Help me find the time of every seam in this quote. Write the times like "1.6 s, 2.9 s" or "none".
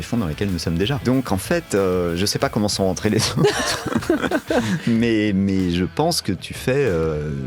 1.0 s